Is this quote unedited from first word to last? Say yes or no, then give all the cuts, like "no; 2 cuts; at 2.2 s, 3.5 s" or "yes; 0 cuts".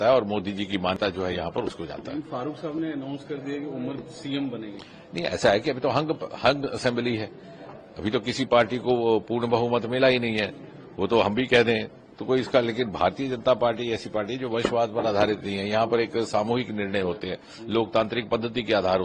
no; 1 cut; at 1.0 s